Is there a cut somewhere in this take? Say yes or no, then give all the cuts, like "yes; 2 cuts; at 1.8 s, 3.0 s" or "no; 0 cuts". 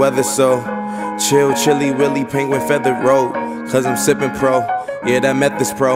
no; 0 cuts